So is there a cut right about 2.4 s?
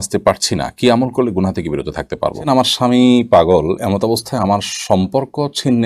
yes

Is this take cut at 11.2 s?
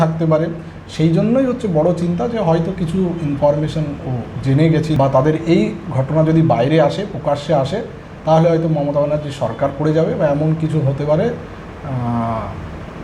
no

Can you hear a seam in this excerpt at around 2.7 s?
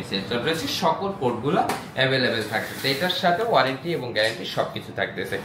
no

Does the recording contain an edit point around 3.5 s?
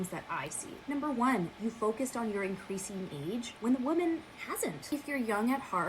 yes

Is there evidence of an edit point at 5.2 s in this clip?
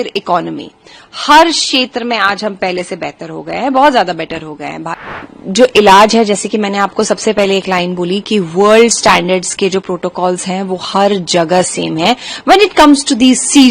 yes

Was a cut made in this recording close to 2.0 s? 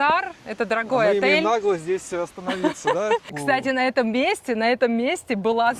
no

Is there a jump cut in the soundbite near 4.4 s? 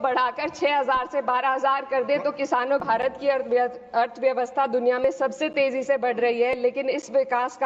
no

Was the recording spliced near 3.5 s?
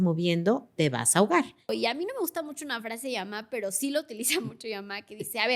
no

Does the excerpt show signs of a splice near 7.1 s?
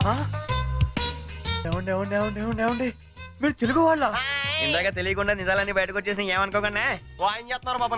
yes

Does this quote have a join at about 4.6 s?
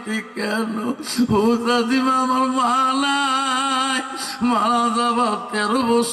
no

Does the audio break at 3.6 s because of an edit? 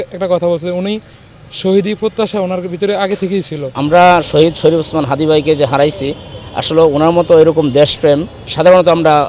yes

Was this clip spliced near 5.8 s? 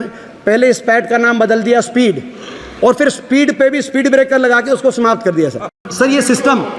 yes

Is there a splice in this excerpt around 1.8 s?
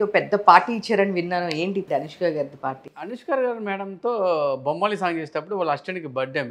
yes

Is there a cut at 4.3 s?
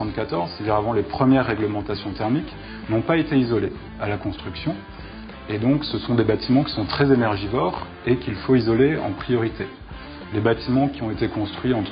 yes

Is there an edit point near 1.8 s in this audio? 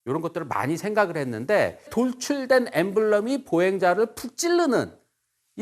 yes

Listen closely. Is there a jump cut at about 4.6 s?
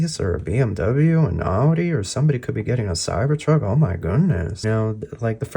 yes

